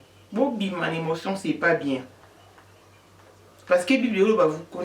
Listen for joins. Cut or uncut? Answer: cut